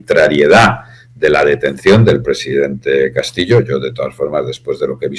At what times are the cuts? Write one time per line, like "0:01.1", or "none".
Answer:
none

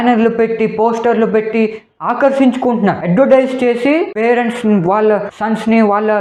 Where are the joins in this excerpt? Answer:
none

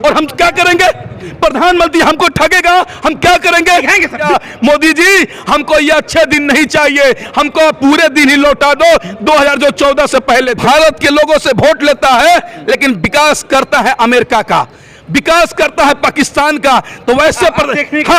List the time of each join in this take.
0:04.2
0:10.6

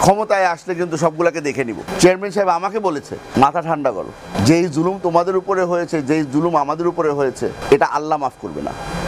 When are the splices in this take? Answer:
none

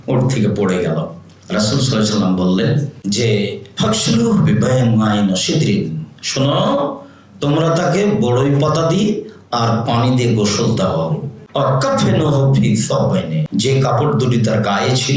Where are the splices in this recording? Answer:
0:02.9
0:11.3
0:13.4

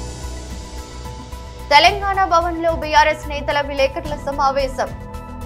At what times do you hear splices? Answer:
0:01.2

